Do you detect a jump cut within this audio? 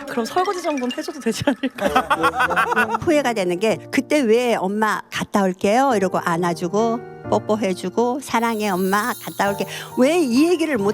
yes; 1 cut; at 3.0 s

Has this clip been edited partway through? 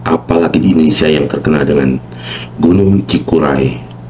no; 0 cuts

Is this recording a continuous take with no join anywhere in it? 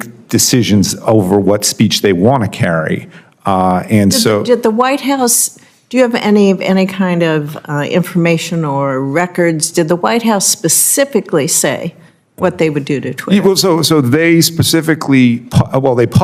yes; 0 cuts

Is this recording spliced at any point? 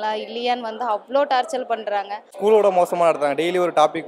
yes; 1 cut; at 2.3 s

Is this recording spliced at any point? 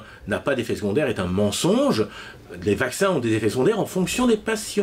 no; 0 cuts

